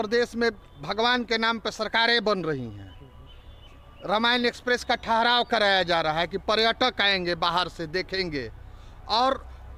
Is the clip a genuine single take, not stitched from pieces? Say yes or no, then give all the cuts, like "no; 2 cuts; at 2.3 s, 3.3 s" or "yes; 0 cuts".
yes; 0 cuts